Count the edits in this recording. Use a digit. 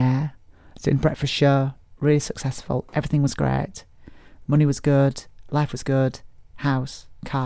1